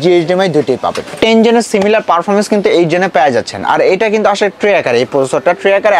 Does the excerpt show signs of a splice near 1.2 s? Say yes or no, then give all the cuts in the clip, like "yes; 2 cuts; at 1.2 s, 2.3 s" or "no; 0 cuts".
yes; 1 cut; at 1.2 s